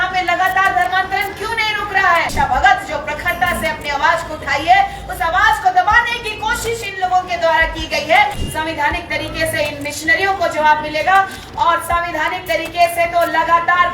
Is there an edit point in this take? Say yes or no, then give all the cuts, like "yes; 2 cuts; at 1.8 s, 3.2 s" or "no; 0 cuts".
yes; 2 cuts; at 2.3 s, 8.4 s